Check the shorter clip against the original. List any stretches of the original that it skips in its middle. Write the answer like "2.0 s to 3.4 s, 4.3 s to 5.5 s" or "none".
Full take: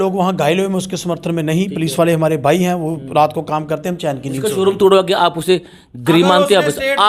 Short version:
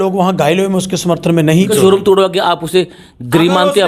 1.7 s to 4.4 s